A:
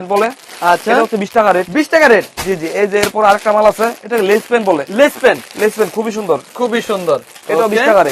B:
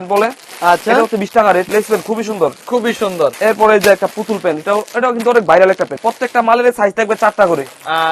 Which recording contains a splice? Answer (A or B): B